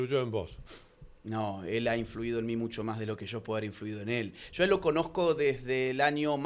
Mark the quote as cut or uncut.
uncut